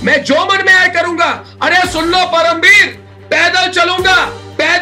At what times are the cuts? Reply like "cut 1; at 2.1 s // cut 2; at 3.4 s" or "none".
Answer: none